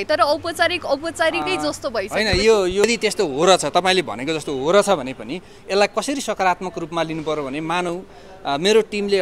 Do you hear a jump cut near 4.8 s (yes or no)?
no